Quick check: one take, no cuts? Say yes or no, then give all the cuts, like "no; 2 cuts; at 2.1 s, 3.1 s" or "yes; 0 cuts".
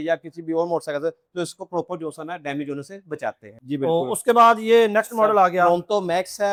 yes; 0 cuts